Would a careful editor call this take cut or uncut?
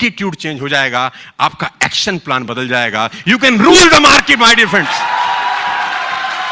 uncut